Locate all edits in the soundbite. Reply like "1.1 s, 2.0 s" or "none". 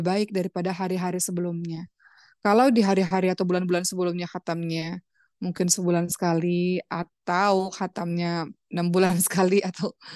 none